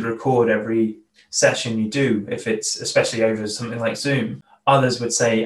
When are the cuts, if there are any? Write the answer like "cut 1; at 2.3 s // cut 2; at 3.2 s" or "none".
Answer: cut 1; at 1.1 s // cut 2; at 4.4 s